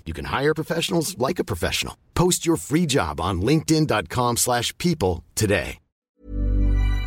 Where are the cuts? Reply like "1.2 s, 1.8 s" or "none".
6.1 s